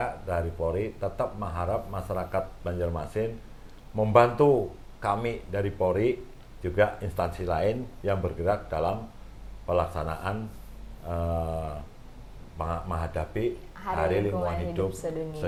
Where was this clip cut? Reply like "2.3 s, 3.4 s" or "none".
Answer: none